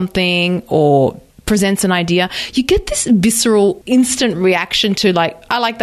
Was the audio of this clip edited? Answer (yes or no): yes